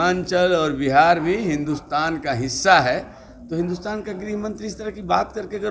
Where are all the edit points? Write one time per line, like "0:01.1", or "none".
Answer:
none